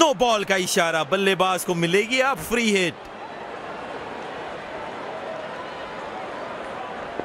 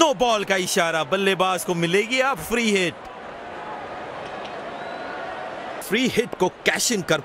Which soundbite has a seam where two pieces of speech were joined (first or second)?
second